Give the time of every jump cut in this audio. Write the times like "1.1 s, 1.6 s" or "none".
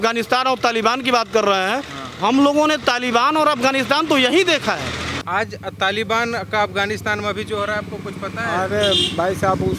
5.2 s